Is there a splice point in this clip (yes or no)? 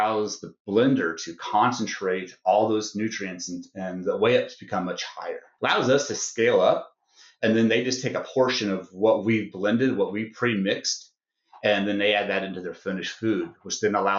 yes